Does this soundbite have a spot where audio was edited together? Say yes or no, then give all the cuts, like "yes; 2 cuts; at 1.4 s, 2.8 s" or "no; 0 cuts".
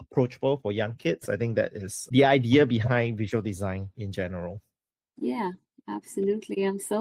no; 0 cuts